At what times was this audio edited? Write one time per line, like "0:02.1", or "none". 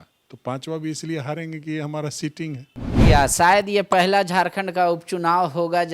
0:03.1